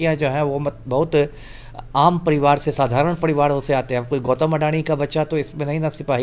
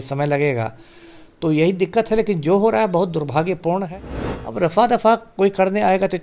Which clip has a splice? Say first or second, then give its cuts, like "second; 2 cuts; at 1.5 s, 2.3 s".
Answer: second; 1 cut; at 3.9 s